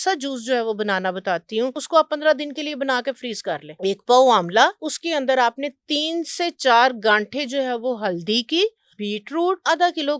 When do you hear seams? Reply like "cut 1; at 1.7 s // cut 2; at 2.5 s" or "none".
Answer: cut 1; at 1.8 s // cut 2; at 3.7 s // cut 3; at 4.9 s // cut 4; at 9.1 s